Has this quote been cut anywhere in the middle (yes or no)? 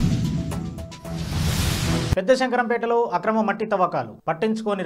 yes